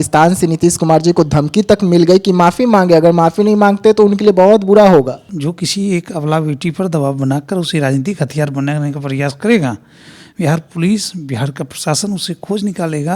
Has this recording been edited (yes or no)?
yes